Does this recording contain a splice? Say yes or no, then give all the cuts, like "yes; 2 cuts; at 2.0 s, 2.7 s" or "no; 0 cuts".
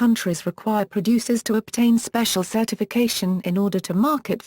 yes; 1 cut; at 3.2 s